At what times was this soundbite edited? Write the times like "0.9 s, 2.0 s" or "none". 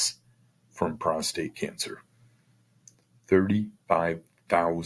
none